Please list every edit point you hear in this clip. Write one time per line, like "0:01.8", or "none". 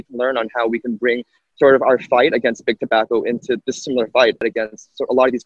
0:04.4